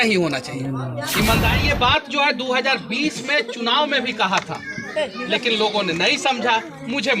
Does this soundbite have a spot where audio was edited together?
yes; 1 cut; at 1.6 s

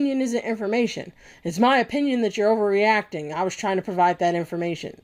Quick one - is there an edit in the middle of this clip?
no; 0 cuts

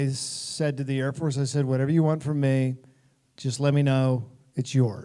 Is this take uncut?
yes; 0 cuts

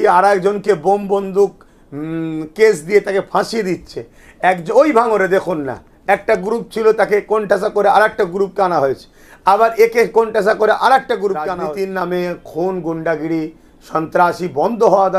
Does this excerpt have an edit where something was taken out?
yes; 1 cut; at 11.6 s

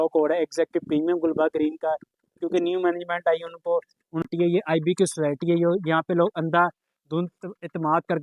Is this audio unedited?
no; 1 cut; at 4.2 s

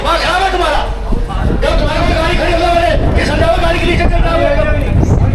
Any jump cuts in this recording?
no; 0 cuts

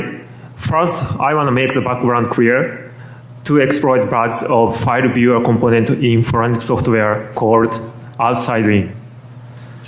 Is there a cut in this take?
no; 0 cuts

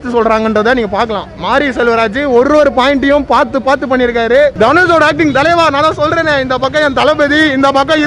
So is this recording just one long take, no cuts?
no; 1 cut; at 4.5 s

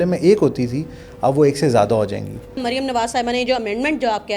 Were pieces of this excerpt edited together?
yes; 1 cut; at 2.6 s

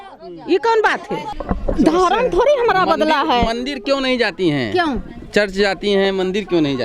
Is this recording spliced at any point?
yes; 1 cut; at 1.3 s

